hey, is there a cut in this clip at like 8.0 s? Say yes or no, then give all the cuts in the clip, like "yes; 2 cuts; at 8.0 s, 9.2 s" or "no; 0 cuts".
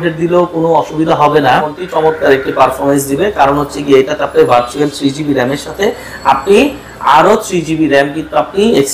no; 1 cut; at 1.6 s